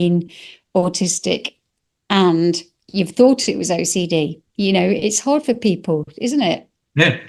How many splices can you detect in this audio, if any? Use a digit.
0